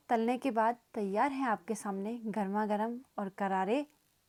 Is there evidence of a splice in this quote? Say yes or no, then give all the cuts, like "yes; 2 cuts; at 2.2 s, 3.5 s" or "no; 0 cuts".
no; 0 cuts